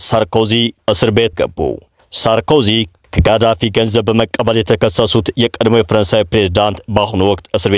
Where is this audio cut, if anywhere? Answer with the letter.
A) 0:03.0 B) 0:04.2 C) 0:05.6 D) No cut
A